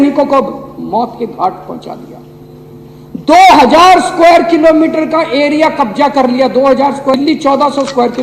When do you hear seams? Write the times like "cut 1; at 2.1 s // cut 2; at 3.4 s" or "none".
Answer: cut 1; at 7.2 s